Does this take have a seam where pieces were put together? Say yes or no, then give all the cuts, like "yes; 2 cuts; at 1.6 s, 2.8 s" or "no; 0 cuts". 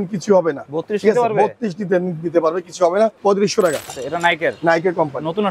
yes; 2 cuts; at 3.2 s, 4.0 s